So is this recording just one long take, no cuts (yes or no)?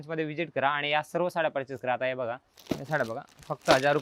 no